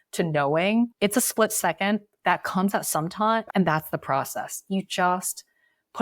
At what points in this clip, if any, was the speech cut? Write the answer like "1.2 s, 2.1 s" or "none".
3.4 s